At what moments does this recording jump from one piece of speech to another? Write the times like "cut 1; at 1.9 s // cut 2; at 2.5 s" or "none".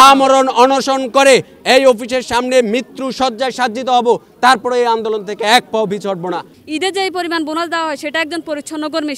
cut 1; at 6.5 s